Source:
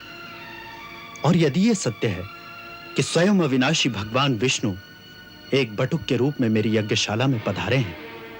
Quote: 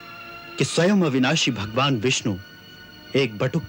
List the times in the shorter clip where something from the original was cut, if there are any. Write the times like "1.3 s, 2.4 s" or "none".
none